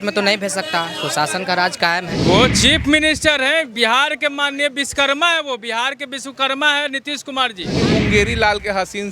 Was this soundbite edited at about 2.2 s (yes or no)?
yes